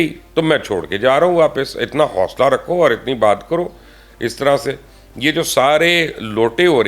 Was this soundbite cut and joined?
no; 0 cuts

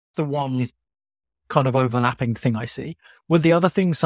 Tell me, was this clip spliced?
no; 0 cuts

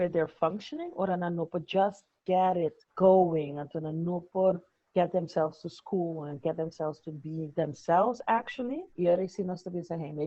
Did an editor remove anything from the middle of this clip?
no; 0 cuts

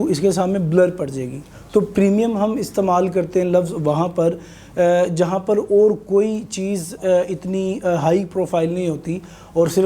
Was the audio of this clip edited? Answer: no; 0 cuts

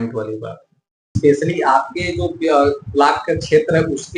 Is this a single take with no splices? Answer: no; 1 cut; at 1.0 s

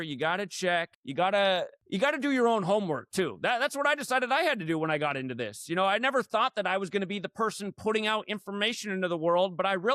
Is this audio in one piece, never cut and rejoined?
no; 2 cuts; at 1.0 s, 1.8 s

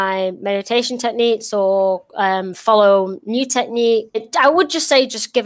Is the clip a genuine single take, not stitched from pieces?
no; 1 cut; at 4.2 s

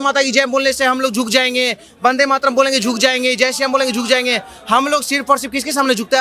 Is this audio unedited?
yes; 0 cuts

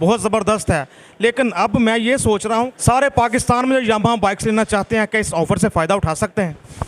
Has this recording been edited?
yes; 1 cut; at 2.7 s

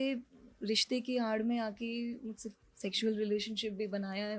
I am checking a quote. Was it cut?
no; 0 cuts

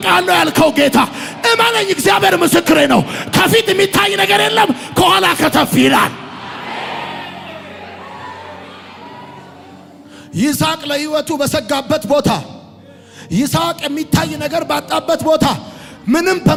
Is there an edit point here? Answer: no; 0 cuts

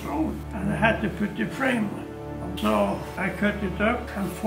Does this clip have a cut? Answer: yes; 1 cut; at 3.2 s

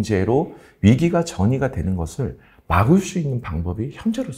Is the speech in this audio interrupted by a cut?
no; 0 cuts

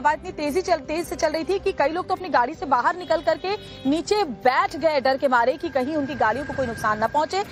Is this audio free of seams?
yes; 0 cuts

